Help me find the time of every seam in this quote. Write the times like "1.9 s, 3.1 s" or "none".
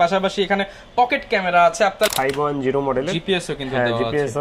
2.1 s

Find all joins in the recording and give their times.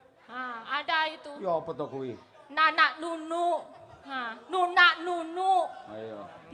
none

